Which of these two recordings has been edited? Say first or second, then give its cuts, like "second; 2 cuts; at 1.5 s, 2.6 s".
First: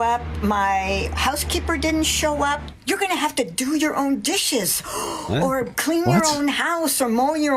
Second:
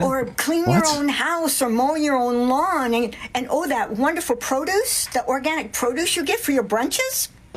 first; 1 cut; at 2.7 s